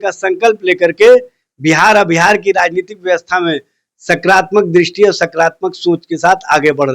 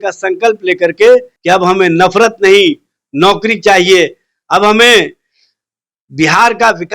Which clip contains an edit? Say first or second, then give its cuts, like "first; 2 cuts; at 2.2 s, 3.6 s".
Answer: second; 1 cut; at 1.3 s